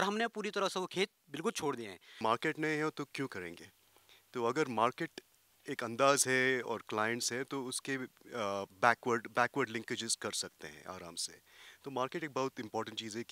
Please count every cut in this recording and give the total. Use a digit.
1